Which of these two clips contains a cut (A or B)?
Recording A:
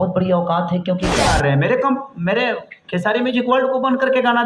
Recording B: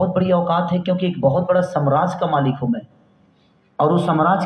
A